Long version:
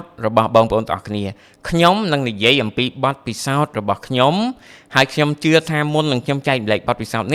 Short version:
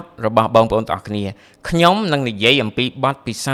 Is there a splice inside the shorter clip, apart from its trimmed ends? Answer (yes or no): no